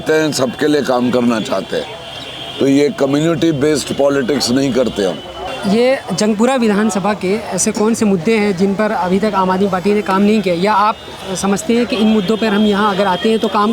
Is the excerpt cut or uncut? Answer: uncut